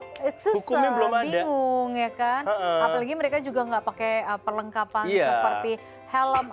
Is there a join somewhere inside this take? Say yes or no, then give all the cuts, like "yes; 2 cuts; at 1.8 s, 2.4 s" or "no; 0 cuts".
no; 0 cuts